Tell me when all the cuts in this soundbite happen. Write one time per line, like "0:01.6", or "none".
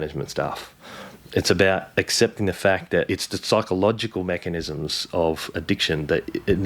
0:03.1